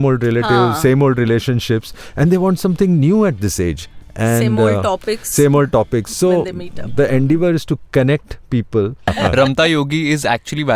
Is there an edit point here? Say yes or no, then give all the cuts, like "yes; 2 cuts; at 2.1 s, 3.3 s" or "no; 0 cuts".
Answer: yes; 1 cut; at 9.1 s